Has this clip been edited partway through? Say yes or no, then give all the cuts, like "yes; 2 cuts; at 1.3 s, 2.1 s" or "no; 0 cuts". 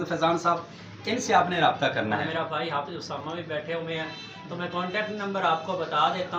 no; 0 cuts